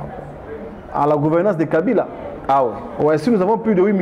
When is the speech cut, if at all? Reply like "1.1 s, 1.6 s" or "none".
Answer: none